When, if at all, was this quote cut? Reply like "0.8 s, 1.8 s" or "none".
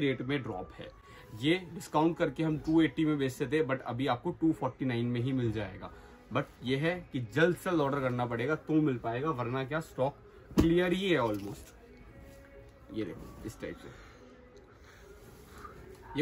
none